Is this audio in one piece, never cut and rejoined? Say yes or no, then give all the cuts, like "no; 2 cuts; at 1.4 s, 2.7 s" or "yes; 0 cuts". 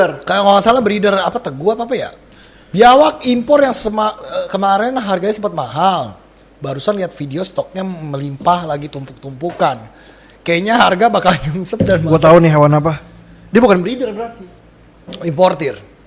yes; 0 cuts